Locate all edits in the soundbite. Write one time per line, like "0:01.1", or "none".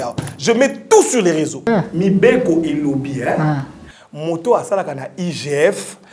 0:01.6